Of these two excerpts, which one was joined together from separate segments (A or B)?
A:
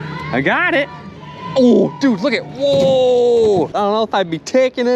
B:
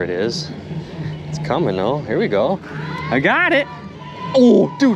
A